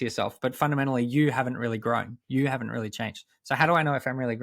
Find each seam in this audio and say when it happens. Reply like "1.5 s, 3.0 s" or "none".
none

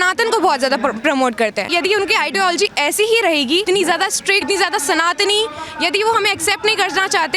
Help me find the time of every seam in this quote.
1.7 s, 3.6 s, 4.4 s

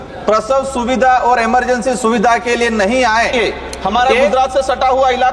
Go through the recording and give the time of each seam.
3.3 s

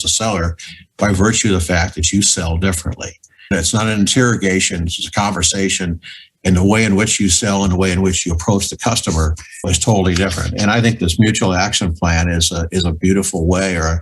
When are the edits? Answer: 3.5 s, 9.7 s

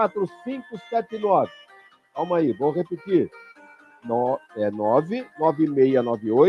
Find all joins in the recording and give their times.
none

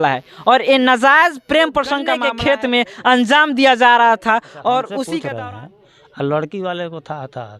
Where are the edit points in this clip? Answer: 2.1 s, 5.3 s

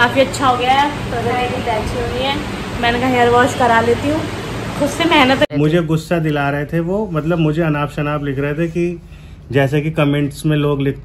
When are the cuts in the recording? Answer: 5.5 s

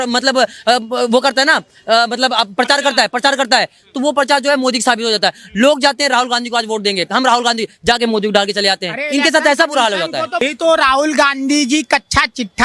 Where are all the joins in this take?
10.4 s

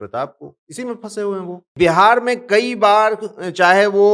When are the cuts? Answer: 1.7 s

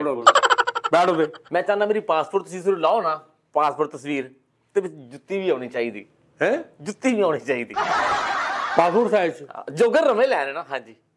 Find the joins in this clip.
1.4 s

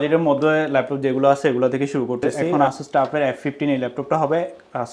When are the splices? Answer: 2.3 s

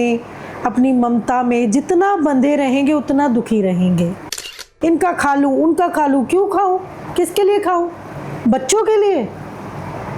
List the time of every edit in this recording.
4.7 s

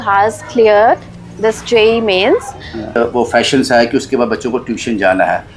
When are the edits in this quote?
2.9 s

